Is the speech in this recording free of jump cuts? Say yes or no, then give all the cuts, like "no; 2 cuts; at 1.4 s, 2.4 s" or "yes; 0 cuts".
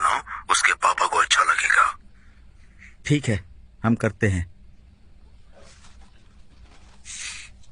yes; 0 cuts